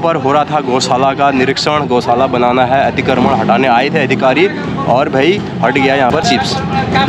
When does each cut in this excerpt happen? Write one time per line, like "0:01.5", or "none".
0:06.2